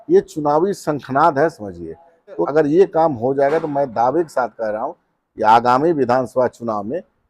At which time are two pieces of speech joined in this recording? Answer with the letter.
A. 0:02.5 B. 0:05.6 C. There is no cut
A